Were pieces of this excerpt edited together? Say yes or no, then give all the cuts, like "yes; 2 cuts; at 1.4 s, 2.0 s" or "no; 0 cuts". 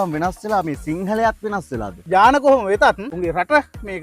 yes; 2 cuts; at 1.9 s, 3.1 s